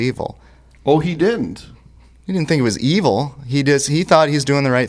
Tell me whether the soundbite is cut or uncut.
uncut